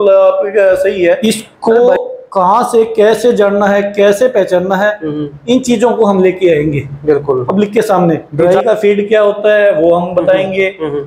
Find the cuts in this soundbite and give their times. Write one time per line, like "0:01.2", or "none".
0:01.2
0:08.3